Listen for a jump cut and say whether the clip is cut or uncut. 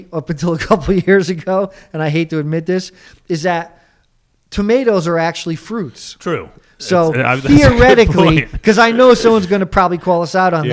uncut